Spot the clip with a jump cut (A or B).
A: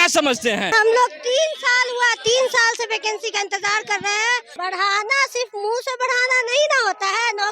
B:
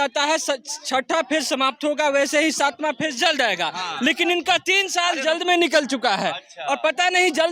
A